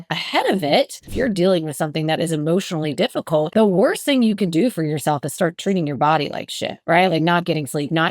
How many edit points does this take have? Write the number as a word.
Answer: two